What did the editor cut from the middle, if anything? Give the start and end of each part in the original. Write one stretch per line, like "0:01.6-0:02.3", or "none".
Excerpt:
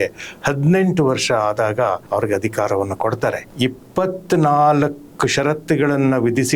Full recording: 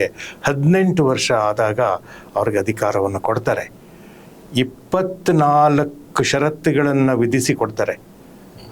0:02.0-0:02.3
0:03.7-0:04.4